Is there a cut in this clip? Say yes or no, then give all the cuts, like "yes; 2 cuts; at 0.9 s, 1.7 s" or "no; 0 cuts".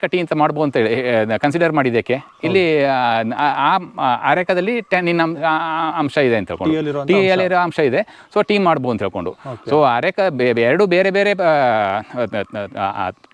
no; 0 cuts